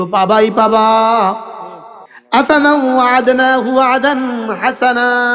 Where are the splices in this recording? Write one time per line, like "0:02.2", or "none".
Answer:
none